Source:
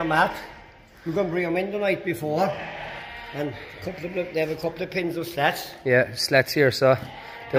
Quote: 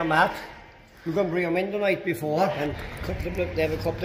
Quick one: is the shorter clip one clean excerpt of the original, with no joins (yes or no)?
no